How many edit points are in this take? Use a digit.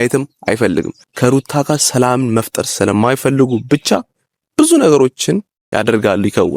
2